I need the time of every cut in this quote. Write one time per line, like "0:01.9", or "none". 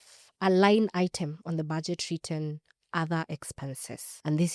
none